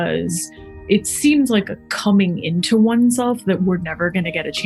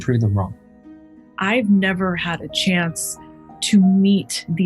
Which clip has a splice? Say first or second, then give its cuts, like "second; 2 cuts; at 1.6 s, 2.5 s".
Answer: second; 1 cut; at 1.1 s